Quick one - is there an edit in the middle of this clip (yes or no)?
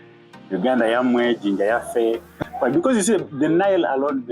yes